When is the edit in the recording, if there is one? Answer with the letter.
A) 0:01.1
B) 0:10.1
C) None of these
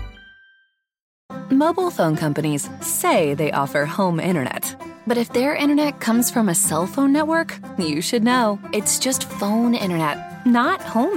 A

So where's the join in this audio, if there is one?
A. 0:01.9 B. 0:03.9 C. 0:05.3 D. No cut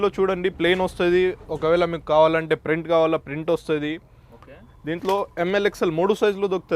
D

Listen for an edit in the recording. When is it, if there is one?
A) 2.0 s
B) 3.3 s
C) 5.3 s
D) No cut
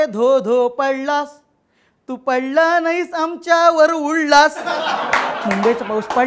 C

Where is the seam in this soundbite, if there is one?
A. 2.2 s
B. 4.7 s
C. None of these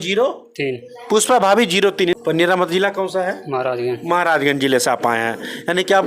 A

